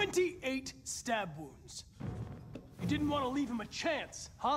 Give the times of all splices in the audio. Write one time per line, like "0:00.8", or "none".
none